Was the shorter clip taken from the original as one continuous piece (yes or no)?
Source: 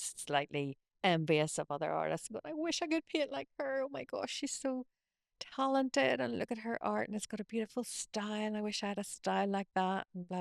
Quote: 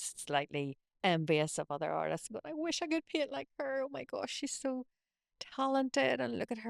yes